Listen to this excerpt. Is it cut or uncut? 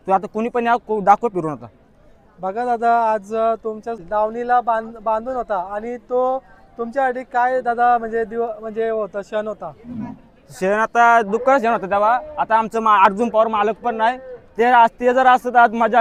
uncut